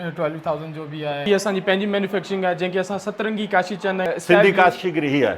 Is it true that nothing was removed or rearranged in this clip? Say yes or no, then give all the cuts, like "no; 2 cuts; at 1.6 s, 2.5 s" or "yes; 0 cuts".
no; 2 cuts; at 1.3 s, 4.1 s